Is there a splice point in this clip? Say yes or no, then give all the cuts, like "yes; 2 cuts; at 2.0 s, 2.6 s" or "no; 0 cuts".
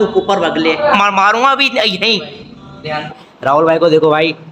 yes; 2 cuts; at 0.9 s, 3.2 s